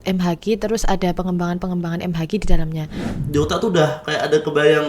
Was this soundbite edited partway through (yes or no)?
yes